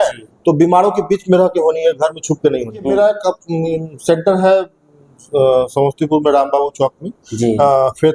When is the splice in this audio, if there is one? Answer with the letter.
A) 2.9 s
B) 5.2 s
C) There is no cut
A